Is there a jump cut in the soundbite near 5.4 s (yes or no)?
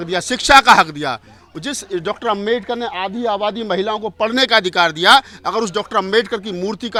no